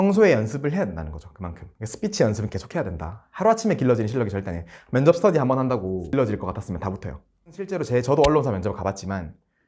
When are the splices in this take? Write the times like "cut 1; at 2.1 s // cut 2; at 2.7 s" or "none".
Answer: cut 1; at 6.1 s // cut 2; at 7.7 s